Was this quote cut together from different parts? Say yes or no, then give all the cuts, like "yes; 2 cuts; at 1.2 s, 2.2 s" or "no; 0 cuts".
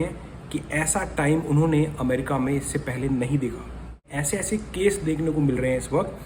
yes; 1 cut; at 4.1 s